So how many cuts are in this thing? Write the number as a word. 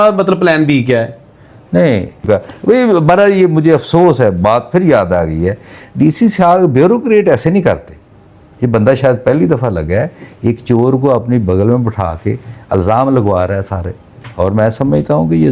one